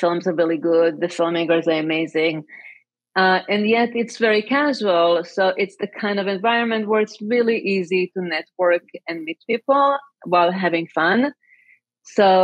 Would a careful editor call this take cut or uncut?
uncut